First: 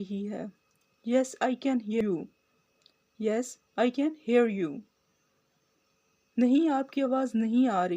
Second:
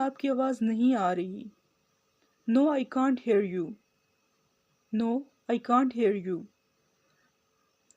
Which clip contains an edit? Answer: first; 1 cut; at 2.0 s

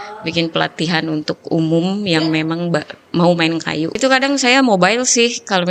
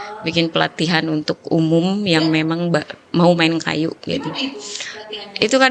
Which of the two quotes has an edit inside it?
first; 1 cut; at 4.0 s

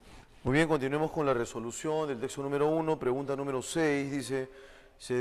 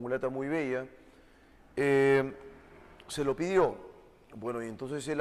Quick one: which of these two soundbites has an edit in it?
first; 1 cut; at 1.5 s

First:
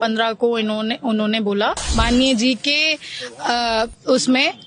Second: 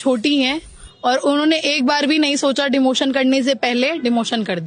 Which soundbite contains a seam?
first; 1 cut; at 1.8 s

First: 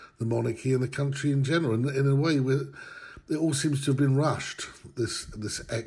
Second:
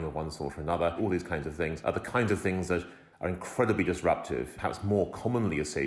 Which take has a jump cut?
second; 2 cuts; at 1.2 s, 4.5 s

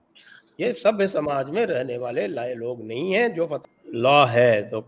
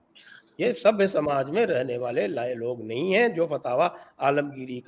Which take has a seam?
first; 1 cut; at 3.6 s

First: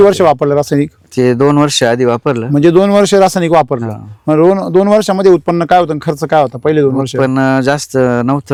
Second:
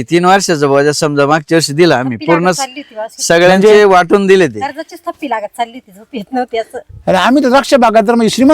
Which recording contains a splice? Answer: second; 1 cut; at 6.9 s

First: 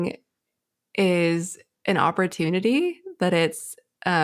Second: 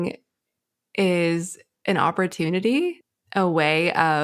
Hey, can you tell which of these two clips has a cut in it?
second; 1 cut; at 3.0 s

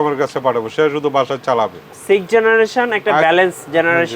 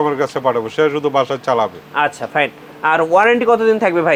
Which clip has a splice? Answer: first; 1 cut; at 1.8 s

